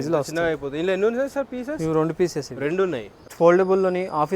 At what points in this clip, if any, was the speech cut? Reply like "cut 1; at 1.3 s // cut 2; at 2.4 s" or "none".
cut 1; at 3.2 s